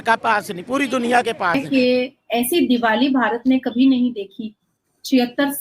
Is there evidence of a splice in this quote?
yes; 1 cut; at 1.6 s

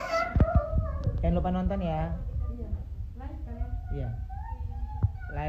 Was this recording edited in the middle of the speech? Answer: no; 0 cuts

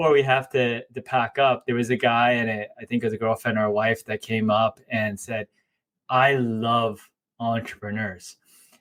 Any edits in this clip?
no; 0 cuts

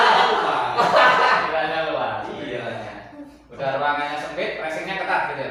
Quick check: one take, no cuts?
yes; 0 cuts

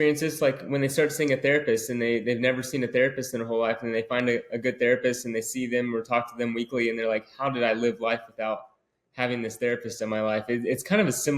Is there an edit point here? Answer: no; 0 cuts

